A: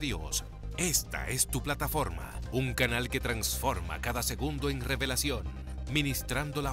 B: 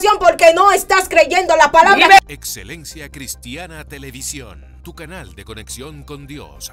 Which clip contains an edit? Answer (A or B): B